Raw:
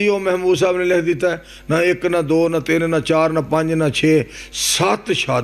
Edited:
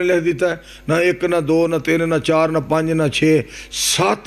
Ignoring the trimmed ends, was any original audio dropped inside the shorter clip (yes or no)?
no